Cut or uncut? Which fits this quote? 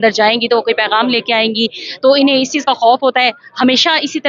uncut